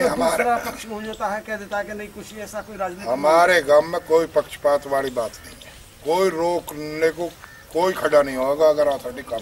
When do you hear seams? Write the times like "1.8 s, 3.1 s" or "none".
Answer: none